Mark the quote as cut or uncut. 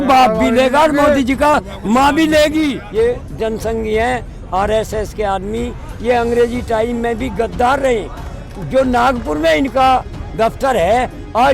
cut